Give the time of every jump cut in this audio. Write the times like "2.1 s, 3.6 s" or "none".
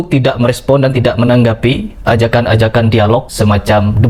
none